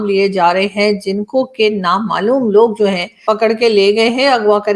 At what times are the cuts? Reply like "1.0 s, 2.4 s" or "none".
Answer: 3.1 s